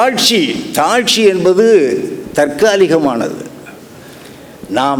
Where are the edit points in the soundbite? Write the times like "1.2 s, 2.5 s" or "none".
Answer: none